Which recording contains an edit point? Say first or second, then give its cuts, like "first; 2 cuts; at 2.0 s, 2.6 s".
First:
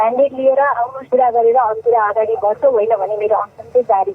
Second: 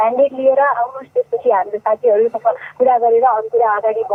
first; 1 cut; at 1.0 s